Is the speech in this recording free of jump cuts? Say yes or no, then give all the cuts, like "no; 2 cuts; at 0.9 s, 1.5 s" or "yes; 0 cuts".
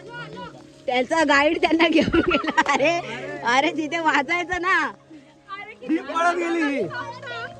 yes; 0 cuts